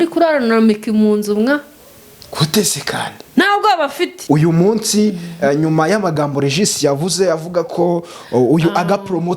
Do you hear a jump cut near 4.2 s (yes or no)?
yes